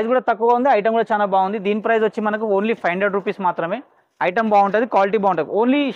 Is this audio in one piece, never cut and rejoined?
yes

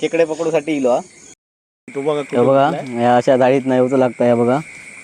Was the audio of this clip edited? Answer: yes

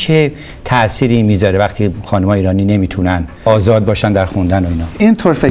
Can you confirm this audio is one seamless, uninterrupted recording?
no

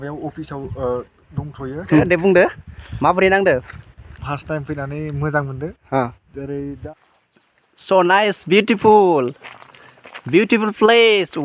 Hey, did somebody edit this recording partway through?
yes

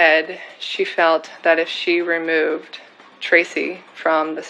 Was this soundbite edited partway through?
no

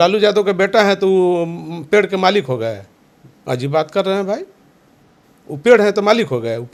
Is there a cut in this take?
no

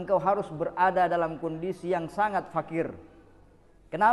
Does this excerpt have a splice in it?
no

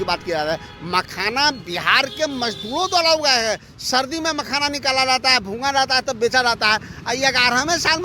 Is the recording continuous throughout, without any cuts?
yes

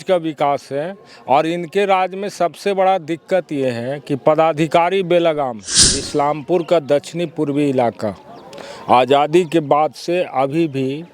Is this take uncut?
no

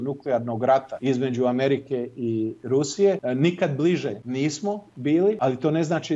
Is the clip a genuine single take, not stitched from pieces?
no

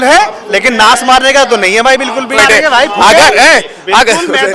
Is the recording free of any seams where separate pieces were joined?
no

